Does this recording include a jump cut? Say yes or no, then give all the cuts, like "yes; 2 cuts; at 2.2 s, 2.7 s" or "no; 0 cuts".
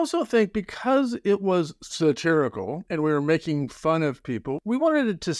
yes; 2 cuts; at 2.8 s, 4.5 s